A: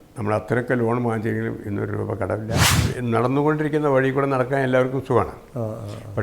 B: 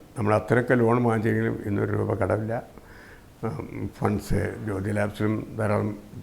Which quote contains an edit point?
A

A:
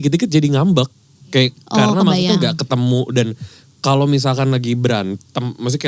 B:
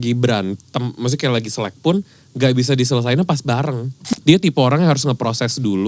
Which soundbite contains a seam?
B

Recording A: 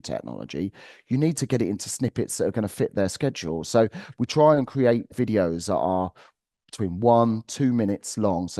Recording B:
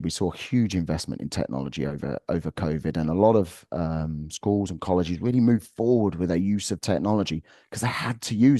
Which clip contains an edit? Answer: A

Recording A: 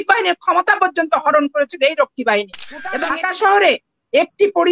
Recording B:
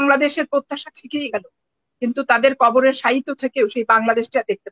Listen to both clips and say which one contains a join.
A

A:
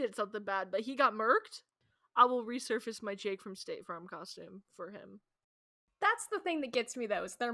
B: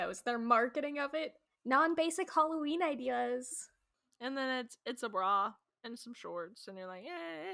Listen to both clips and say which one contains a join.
A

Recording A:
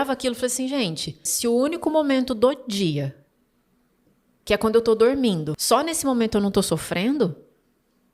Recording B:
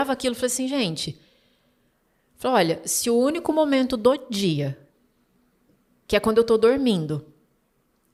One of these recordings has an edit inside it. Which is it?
A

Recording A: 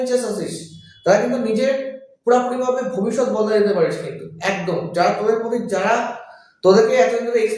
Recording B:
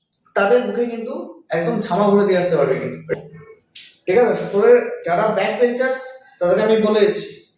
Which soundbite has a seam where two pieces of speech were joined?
B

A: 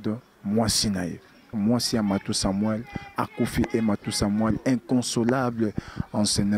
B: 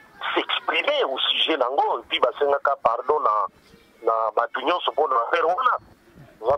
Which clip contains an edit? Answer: A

